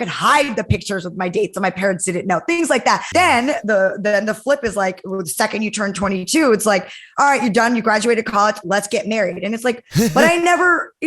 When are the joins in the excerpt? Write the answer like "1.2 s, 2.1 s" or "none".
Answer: 3.1 s